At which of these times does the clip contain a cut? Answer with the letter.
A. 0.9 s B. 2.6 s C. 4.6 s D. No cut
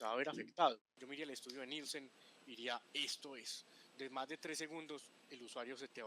A